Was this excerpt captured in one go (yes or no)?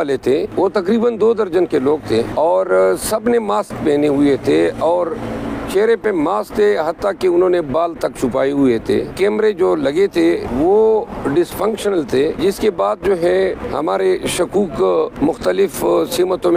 no